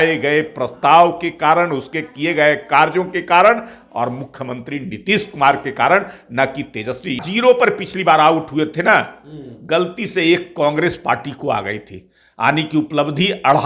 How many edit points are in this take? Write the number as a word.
one